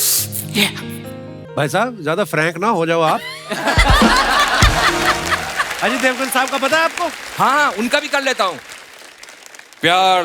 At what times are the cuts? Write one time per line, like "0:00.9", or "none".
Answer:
0:01.4